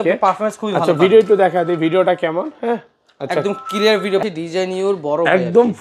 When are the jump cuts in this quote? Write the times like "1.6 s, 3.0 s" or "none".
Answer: 4.2 s